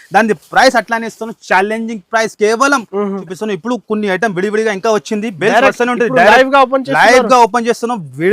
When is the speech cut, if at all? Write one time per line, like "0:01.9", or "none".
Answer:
0:03.2